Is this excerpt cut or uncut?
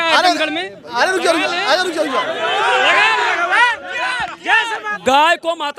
cut